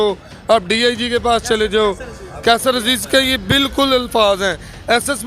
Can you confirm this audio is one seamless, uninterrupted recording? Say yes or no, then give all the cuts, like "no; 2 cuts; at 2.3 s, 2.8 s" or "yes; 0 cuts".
yes; 0 cuts